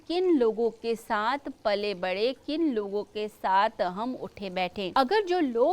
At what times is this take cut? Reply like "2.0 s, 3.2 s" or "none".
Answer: 4.8 s

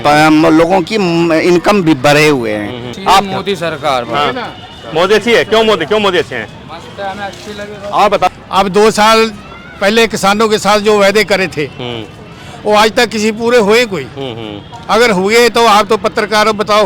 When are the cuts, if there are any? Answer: 2.9 s, 8.3 s

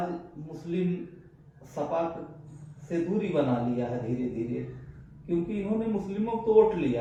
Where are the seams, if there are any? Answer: none

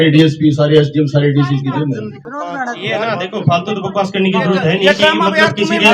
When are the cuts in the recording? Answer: 2.2 s

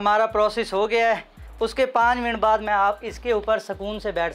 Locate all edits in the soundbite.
1.4 s

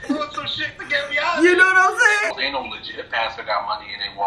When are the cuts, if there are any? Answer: 2.3 s

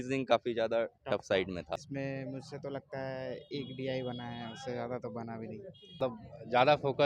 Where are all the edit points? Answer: 1.8 s, 6.0 s

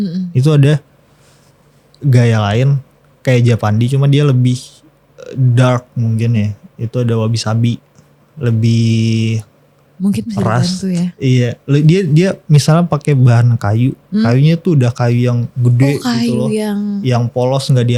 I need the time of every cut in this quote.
none

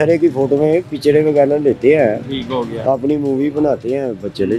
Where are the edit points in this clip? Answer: none

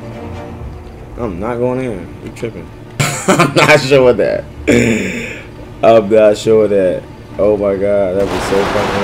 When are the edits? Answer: 3.0 s

